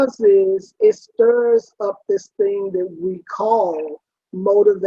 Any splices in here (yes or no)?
no